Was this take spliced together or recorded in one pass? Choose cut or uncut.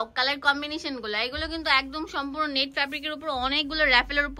uncut